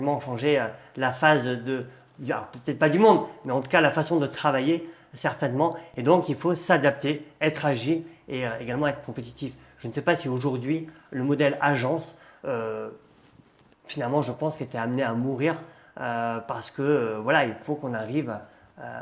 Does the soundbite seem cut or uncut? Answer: uncut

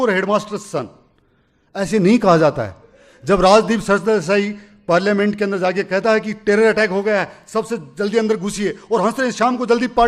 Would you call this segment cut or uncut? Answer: uncut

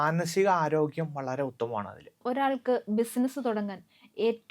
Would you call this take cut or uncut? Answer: cut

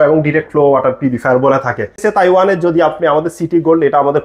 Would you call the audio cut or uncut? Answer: cut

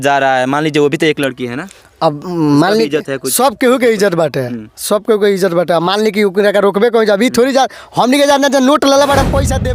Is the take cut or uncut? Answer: uncut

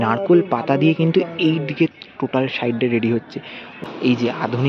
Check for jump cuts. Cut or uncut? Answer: cut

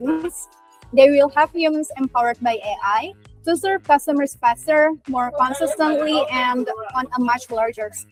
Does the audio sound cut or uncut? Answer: uncut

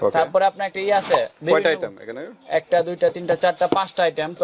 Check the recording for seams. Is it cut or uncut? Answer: uncut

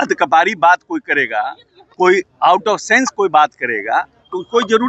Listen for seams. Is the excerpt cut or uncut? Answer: uncut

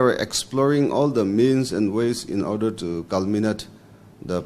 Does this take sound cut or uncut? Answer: uncut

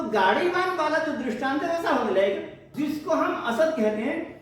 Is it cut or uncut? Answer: cut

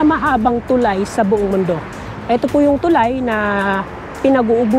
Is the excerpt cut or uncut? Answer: uncut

